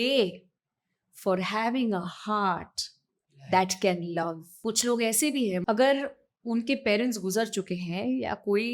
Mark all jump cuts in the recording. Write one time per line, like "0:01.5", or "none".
0:04.6
0:05.6